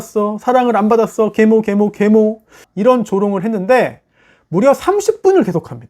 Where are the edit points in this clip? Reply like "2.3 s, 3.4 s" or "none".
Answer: 2.7 s